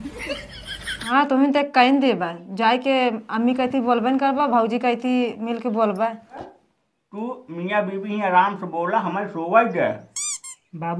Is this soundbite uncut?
no; 2 cuts; at 0.9 s, 6.5 s

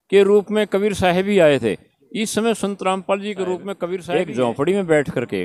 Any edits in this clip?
yes; 1 cut; at 4.0 s

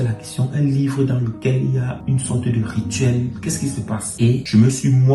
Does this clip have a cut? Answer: no; 0 cuts

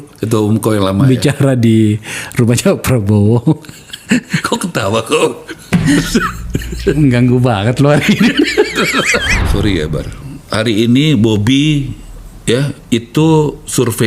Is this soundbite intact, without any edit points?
no; 1 cut; at 9.4 s

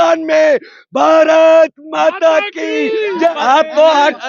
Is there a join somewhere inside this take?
yes; 1 cut; at 3.3 s

